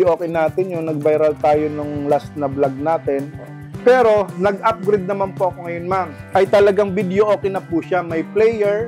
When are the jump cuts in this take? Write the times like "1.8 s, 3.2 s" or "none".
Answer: 3.6 s, 6.1 s